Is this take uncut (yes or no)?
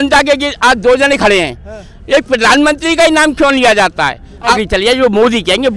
no